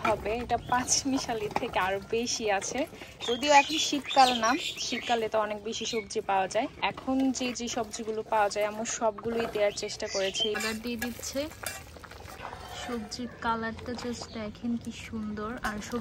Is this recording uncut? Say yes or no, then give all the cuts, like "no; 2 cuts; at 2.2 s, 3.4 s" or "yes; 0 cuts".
no; 4 cuts; at 3.2 s, 6.8 s, 10.6 s, 12.4 s